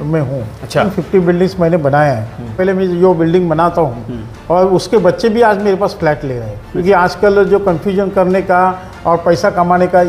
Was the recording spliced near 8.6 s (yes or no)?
no